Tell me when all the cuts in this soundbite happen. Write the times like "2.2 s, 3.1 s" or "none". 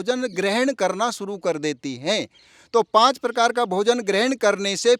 none